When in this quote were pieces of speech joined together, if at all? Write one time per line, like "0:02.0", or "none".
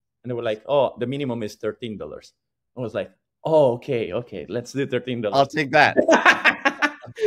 none